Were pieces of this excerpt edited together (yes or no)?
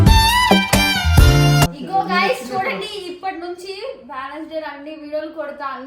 yes